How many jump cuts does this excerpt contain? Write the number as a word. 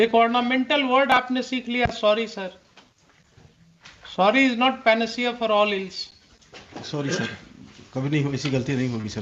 zero